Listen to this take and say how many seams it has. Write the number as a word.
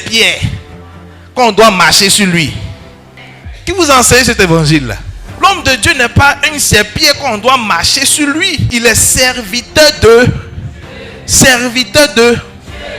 one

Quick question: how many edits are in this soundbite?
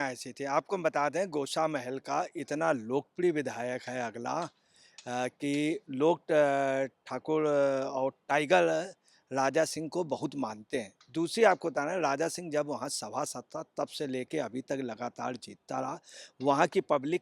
zero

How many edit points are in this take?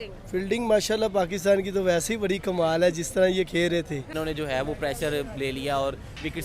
one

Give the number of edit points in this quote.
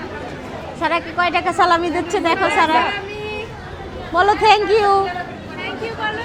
zero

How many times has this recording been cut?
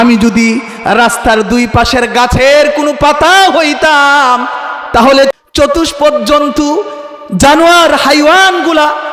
one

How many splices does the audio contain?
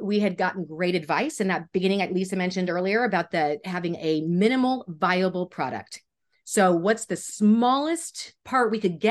zero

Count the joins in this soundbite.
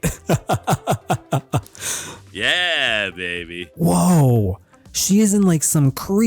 one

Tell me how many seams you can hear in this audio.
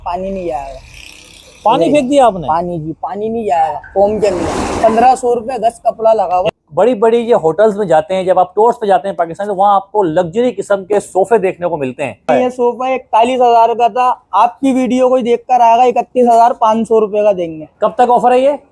two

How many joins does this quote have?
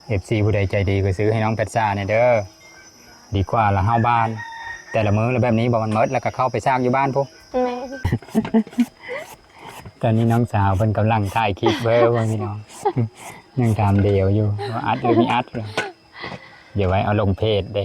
one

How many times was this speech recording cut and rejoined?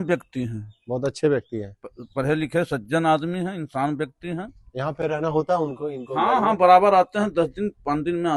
zero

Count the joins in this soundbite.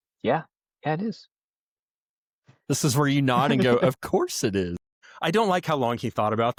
zero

